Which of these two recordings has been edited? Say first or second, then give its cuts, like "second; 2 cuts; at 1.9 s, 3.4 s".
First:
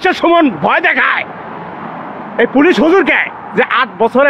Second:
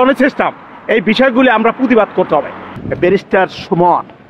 second; 1 cut; at 2.8 s